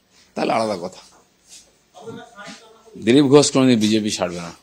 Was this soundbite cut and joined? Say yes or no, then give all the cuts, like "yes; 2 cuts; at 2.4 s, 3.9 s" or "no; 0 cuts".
no; 0 cuts